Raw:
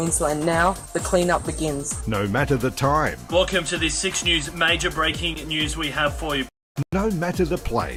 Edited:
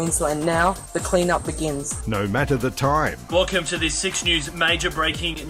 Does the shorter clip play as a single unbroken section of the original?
yes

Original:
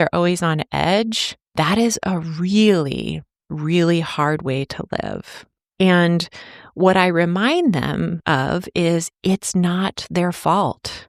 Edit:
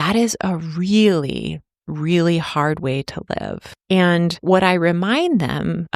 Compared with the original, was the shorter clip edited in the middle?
yes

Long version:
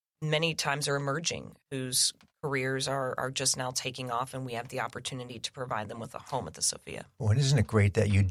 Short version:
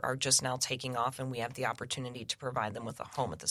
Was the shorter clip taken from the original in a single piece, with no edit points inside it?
yes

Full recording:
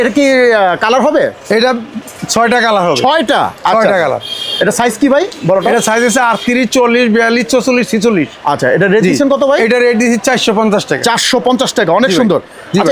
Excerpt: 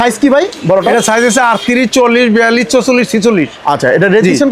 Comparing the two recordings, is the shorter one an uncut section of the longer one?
yes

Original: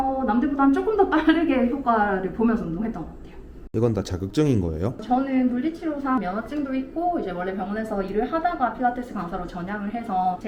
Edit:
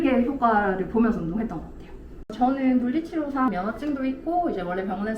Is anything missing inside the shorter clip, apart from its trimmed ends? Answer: yes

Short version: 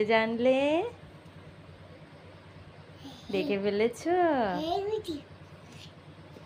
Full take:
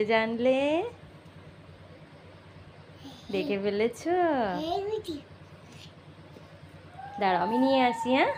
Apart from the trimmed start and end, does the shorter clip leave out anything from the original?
no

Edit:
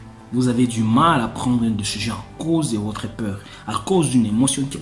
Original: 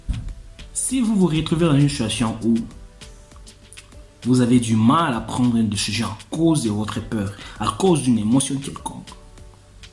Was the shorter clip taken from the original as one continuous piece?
yes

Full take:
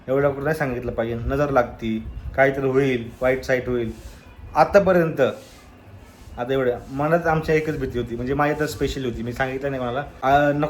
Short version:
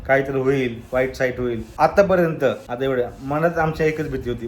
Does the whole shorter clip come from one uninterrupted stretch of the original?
no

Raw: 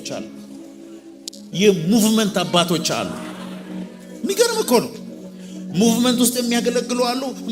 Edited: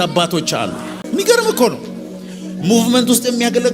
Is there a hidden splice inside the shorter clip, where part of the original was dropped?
yes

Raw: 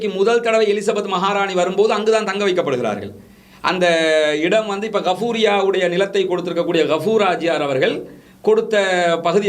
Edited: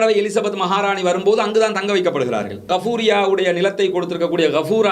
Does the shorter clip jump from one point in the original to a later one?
yes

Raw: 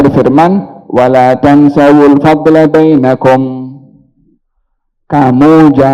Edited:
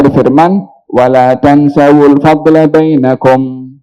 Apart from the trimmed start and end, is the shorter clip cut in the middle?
no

